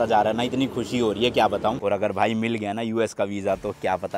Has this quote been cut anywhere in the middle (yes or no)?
yes